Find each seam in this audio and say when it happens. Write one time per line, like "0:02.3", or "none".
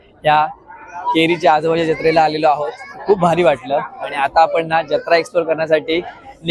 none